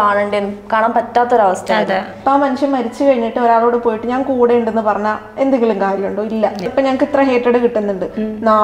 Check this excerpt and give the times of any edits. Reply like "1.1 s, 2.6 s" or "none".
2.1 s, 6.7 s